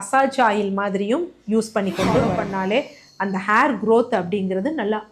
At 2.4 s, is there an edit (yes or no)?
yes